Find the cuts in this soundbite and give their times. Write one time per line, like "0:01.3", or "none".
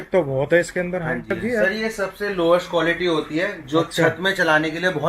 0:01.4